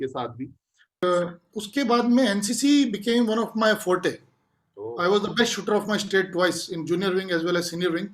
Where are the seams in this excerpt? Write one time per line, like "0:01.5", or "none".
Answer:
0:01.0